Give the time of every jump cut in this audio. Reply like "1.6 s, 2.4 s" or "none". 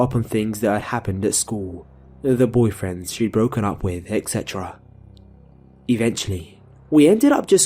1.5 s